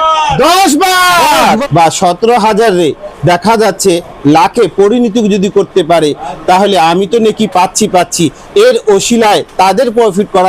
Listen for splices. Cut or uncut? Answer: cut